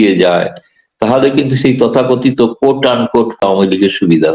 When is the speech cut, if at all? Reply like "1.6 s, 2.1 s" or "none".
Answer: 3.4 s